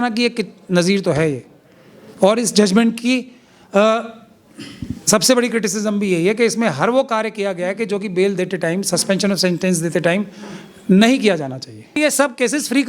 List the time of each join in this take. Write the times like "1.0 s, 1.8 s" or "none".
12.0 s